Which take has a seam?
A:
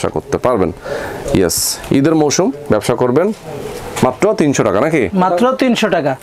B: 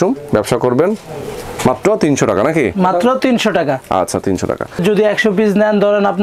B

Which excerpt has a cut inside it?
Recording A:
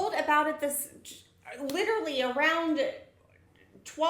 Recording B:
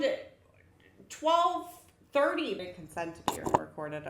B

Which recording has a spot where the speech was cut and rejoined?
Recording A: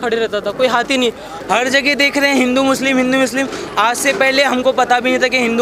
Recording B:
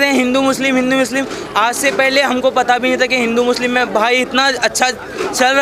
A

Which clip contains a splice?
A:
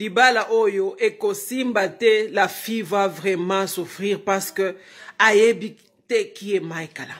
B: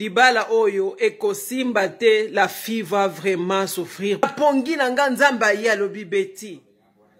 B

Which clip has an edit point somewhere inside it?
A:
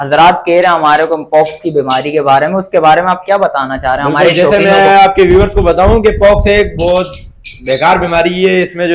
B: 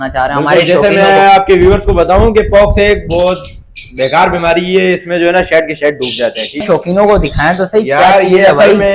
B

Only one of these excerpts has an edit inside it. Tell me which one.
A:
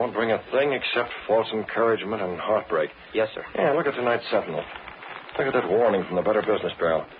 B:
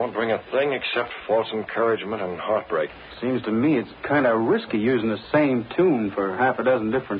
B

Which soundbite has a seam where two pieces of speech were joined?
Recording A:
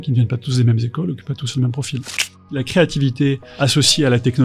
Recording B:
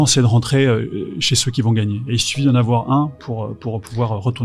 A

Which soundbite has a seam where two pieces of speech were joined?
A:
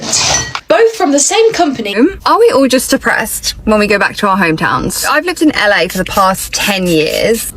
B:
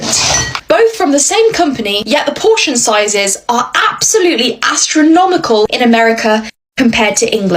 A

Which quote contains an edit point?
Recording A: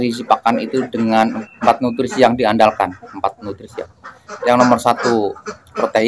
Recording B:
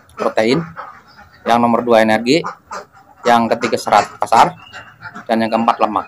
A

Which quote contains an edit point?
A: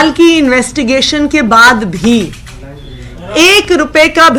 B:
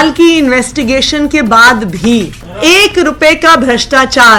B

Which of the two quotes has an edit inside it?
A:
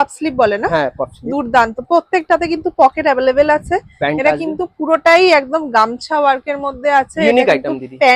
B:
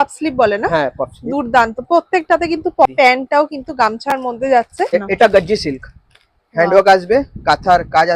B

